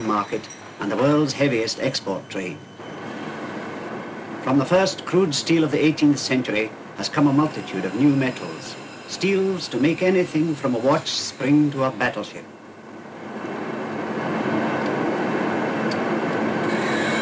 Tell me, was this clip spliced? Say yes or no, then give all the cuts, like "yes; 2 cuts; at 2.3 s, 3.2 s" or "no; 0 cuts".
yes; 1 cut; at 4.2 s